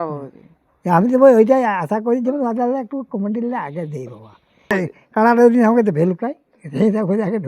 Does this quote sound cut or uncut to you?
cut